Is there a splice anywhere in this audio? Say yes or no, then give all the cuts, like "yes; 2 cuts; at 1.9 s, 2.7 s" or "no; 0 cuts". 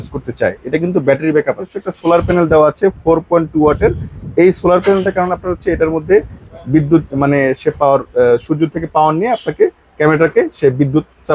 yes; 1 cut; at 1.9 s